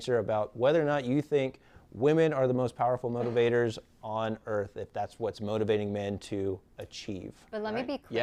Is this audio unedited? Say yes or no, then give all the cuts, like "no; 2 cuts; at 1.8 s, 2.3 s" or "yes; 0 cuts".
yes; 0 cuts